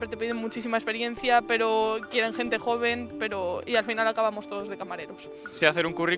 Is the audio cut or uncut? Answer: cut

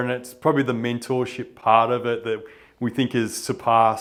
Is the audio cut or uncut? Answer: uncut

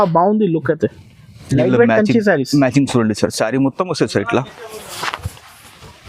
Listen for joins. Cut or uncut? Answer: uncut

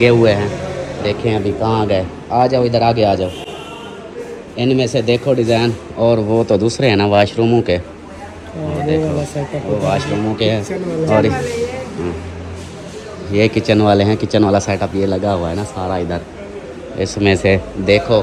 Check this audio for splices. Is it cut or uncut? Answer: uncut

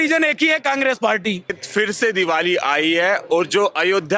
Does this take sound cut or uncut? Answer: cut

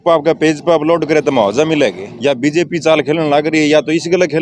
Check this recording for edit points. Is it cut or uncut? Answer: cut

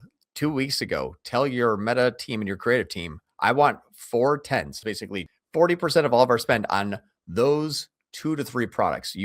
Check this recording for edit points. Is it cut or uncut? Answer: cut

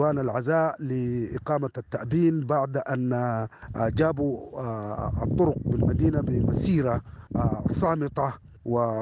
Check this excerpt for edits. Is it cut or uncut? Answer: uncut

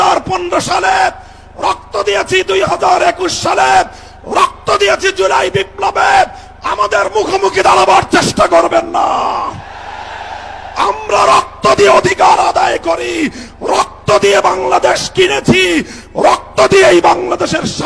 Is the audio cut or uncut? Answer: uncut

